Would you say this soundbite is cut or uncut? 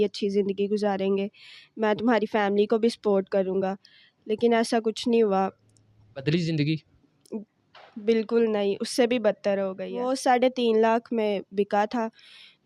cut